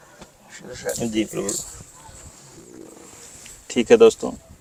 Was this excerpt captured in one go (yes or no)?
yes